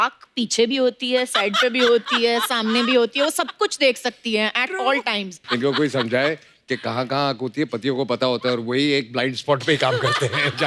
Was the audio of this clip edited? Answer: yes; 1 cut; at 5.4 s

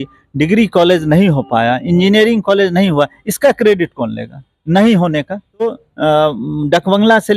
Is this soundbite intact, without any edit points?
no; 1 cut; at 5.8 s

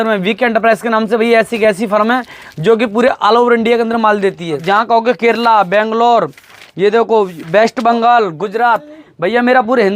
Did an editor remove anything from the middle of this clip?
yes; 1 cut; at 4.6 s

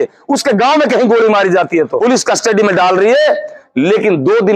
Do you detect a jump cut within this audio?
yes; 1 cut; at 1.9 s

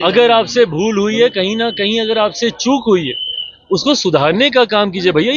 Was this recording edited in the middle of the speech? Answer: no; 0 cuts

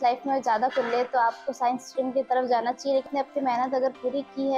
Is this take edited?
yes; 1 cut; at 3.0 s

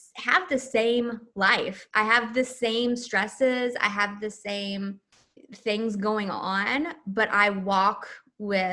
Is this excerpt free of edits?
yes; 0 cuts

